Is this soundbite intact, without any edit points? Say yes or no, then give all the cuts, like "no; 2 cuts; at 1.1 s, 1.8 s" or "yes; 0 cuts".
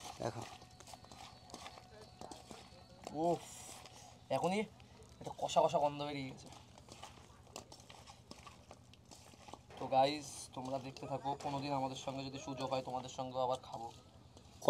yes; 0 cuts